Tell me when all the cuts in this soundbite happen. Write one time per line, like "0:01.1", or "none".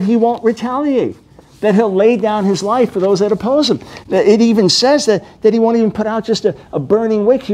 none